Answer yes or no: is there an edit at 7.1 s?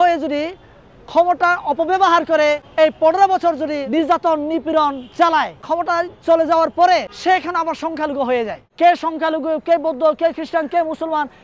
yes